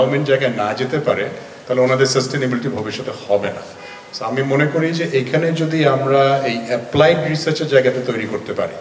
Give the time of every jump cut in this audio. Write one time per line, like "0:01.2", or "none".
none